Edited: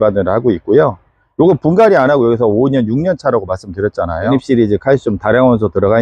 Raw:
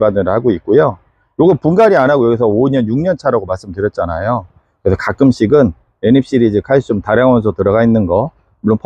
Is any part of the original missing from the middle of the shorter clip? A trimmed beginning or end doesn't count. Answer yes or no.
yes